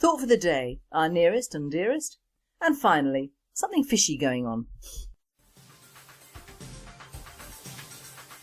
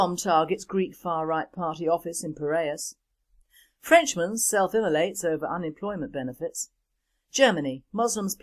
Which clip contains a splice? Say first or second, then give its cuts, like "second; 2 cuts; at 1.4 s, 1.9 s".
second; 1 cut; at 6.6 s